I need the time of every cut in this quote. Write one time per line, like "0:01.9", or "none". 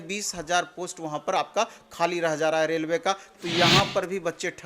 0:03.3